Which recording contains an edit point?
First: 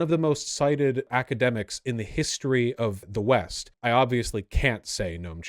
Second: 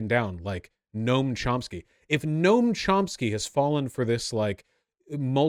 first; 3 cuts; at 1.1 s, 3.0 s, 3.7 s

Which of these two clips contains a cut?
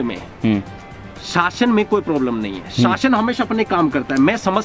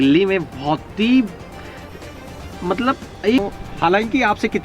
second; 1 cut; at 3.4 s

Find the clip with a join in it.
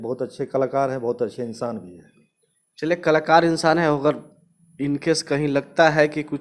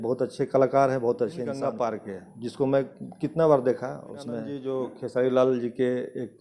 second; 2 cuts; at 1.6 s, 4.6 s

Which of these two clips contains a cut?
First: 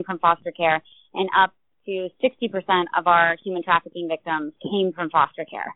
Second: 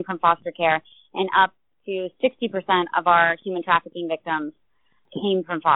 first; 1 cut; at 4.6 s

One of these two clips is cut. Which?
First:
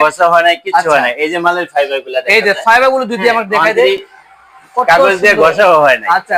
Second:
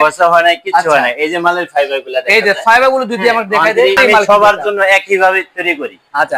second; 1 cut; at 4.0 s

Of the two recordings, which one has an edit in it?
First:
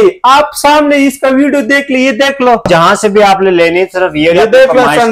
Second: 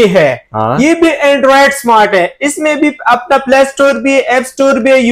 first; 1 cut; at 2.7 s

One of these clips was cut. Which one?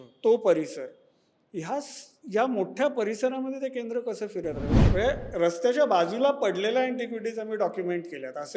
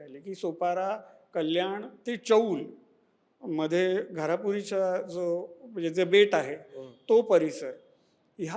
first; 1 cut; at 4.8 s

